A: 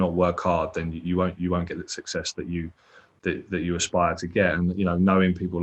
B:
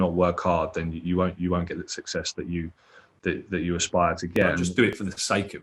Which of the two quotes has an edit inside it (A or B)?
B